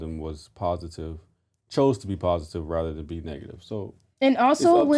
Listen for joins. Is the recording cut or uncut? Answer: uncut